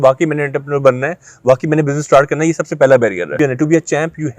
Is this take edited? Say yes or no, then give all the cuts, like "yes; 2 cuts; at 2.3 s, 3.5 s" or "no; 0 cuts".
yes; 1 cut; at 3.3 s